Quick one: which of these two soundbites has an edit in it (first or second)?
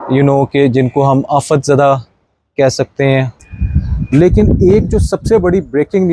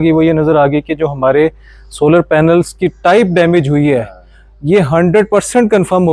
first